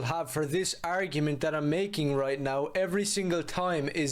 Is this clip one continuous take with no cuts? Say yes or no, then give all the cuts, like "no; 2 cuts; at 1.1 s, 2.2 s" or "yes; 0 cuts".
yes; 0 cuts